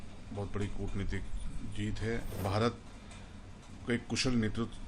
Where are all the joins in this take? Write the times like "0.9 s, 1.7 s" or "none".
2.4 s